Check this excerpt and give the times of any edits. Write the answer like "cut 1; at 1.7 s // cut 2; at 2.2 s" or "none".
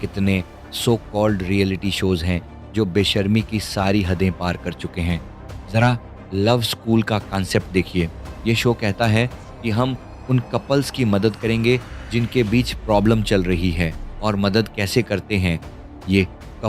none